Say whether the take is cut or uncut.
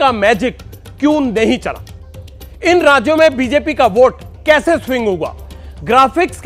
uncut